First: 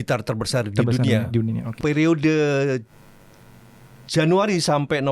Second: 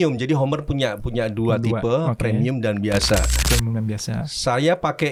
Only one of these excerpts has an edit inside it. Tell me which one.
first; 1 cut; at 1.7 s

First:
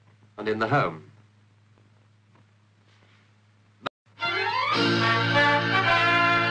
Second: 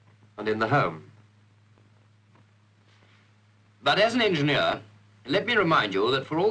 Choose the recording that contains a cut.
second; 1 cut; at 3.9 s

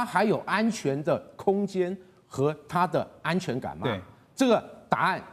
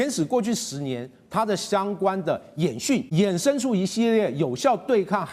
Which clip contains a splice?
second; 1 cut; at 3.1 s

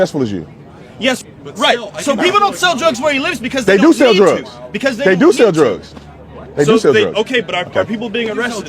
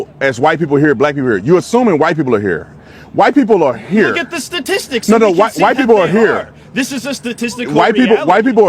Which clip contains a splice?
first; 1 cut; at 1.2 s

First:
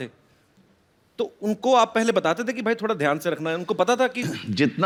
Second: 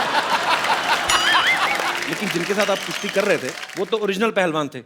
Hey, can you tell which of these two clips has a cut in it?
second; 2 cuts; at 2.0 s, 3.6 s

